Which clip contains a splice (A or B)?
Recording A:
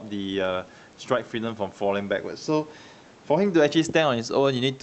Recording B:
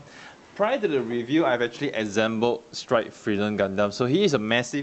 B